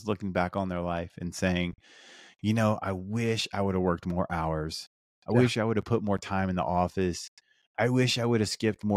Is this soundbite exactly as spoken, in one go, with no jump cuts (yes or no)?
yes